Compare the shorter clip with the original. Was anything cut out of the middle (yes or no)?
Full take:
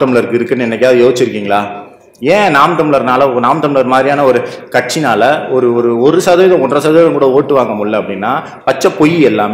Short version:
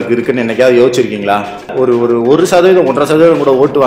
yes